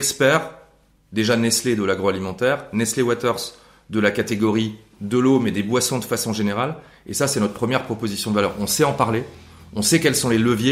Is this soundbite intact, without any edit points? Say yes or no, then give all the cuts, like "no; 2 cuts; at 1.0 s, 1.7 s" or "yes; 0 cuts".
yes; 0 cuts